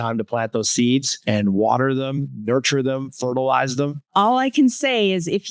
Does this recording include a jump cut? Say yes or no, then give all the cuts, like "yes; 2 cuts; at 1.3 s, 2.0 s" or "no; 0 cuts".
yes; 2 cuts; at 1.1 s, 4.1 s